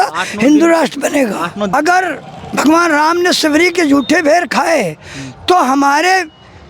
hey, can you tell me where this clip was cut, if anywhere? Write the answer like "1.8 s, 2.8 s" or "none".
1.7 s